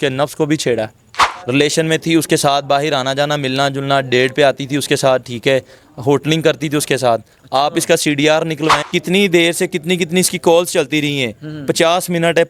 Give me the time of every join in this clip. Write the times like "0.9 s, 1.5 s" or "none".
1.3 s, 8.9 s